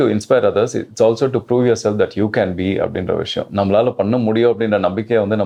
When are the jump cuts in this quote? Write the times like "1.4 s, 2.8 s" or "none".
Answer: none